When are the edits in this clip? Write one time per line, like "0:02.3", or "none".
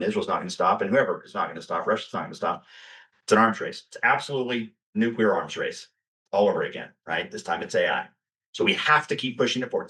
none